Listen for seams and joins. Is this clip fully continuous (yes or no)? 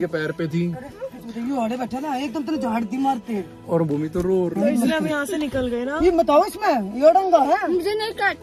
yes